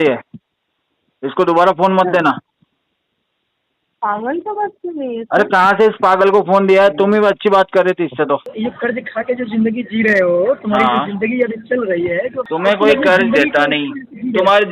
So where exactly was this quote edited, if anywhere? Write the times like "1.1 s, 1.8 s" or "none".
8.5 s, 12.5 s